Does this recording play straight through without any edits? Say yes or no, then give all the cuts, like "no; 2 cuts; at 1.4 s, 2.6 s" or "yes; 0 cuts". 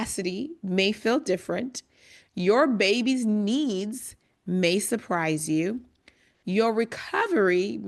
yes; 0 cuts